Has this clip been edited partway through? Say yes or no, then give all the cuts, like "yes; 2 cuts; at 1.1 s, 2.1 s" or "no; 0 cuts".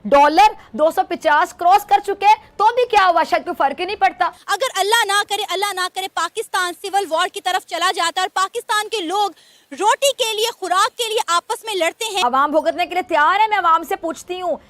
yes; 2 cuts; at 4.4 s, 12.2 s